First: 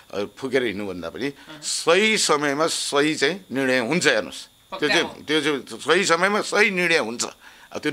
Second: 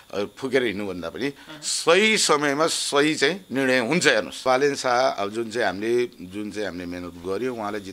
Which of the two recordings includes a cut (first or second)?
second